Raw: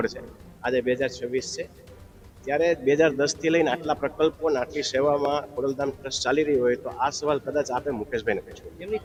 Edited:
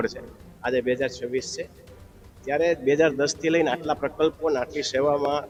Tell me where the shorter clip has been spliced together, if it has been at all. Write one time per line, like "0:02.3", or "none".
none